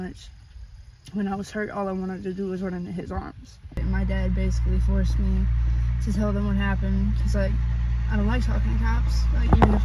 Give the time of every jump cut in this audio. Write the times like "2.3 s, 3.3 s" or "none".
3.8 s